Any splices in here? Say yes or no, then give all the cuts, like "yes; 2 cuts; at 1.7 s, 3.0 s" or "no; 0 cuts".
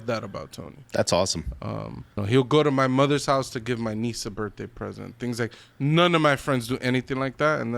yes; 1 cut; at 2.2 s